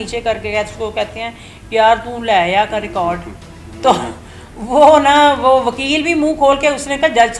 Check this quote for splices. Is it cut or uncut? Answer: uncut